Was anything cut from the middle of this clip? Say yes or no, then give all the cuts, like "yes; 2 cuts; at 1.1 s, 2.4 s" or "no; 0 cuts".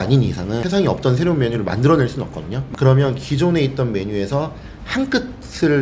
no; 0 cuts